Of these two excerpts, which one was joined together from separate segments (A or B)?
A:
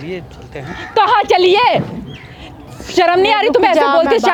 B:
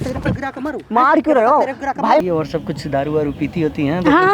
B